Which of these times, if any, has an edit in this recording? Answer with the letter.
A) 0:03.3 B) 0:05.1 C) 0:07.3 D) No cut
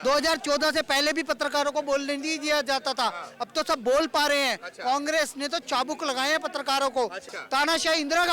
C